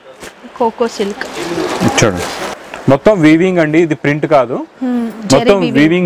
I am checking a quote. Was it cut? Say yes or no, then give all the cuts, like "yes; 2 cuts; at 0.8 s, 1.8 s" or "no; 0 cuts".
yes; 1 cut; at 2.5 s